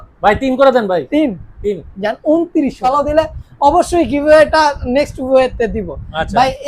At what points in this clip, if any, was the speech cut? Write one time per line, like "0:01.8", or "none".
0:02.9

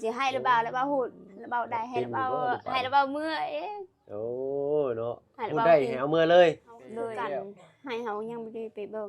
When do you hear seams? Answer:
0:07.1

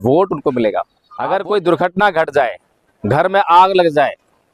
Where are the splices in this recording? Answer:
0:01.0

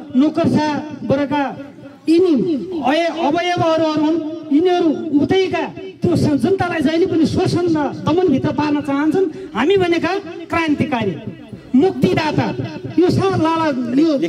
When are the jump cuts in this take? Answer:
none

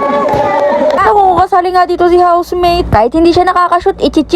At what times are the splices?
0:01.0

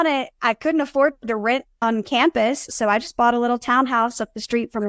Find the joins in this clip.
0:01.8

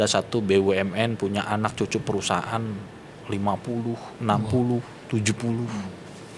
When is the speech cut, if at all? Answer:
none

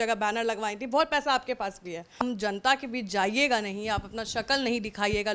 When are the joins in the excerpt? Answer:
0:02.2

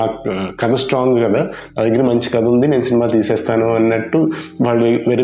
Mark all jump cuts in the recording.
none

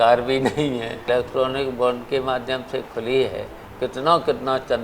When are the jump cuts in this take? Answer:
0:01.0

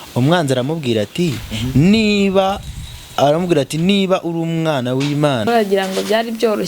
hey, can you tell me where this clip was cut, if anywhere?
0:05.5

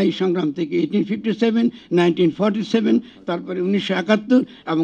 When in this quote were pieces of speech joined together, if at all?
none

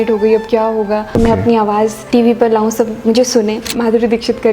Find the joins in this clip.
0:01.1
0:02.0
0:03.7

